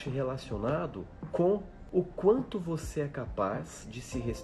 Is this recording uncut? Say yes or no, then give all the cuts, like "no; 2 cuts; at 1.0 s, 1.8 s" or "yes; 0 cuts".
no; 2 cuts; at 1.1 s, 1.8 s